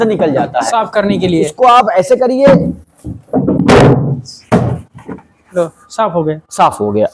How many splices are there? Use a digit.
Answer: 0